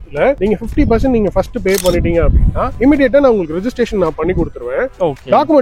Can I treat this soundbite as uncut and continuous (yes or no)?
yes